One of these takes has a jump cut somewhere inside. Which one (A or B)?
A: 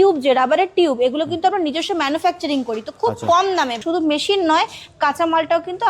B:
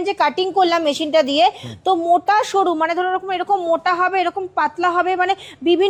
A